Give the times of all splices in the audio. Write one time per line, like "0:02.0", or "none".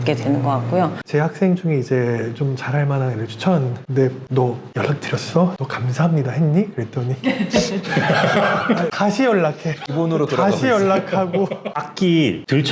0:01.0
0:11.6